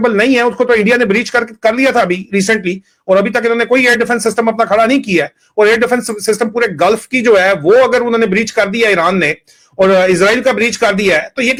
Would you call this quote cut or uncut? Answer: uncut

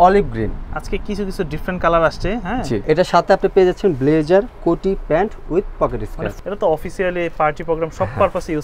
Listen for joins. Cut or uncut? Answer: cut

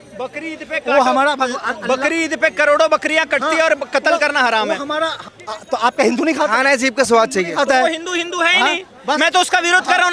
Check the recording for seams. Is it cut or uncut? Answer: cut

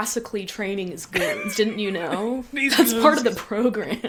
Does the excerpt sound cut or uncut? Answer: uncut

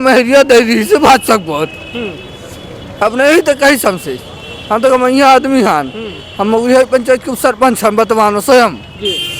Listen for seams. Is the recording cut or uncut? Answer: uncut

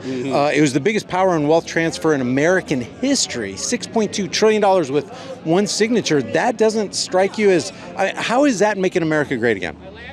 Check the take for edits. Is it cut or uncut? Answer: uncut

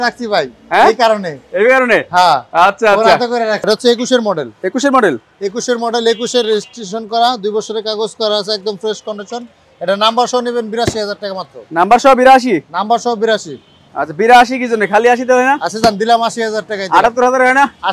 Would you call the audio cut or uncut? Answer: cut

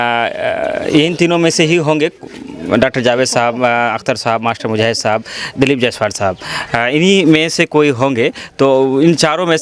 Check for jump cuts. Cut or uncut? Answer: uncut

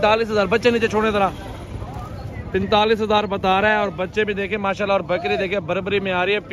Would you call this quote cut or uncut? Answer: uncut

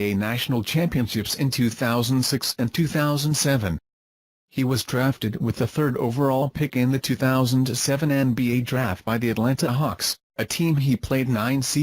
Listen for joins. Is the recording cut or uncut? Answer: cut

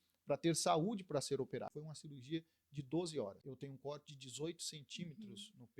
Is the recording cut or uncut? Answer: cut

